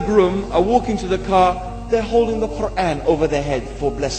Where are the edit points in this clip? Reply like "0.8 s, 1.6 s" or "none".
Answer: none